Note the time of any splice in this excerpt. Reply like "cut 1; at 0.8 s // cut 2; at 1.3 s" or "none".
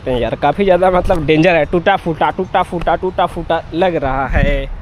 none